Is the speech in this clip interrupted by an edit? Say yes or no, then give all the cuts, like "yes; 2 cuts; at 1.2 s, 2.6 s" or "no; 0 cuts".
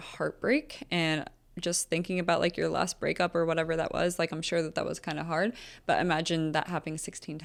no; 0 cuts